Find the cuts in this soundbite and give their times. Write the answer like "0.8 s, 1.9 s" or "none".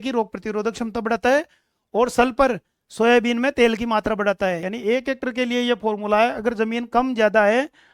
4.7 s